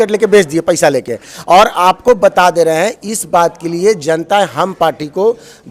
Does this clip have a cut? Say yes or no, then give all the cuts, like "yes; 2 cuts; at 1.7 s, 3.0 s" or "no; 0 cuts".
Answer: no; 0 cuts